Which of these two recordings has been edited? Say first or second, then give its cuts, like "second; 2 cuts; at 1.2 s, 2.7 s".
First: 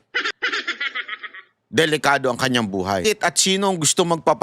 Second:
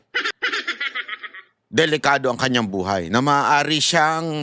first; 1 cut; at 3.0 s